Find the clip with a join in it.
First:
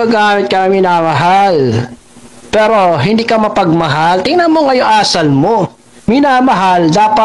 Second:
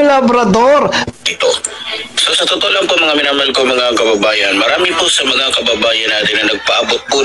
second; 1 cut; at 1.1 s

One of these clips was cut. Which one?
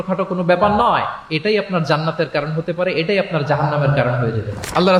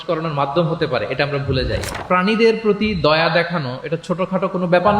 second; 1 cut; at 2.0 s

